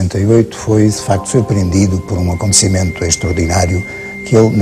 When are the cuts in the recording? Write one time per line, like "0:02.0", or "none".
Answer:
none